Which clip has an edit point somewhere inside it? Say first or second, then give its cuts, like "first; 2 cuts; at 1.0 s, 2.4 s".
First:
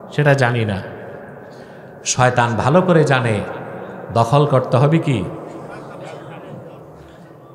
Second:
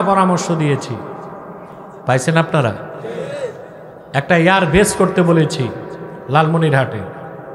second; 1 cut; at 1.8 s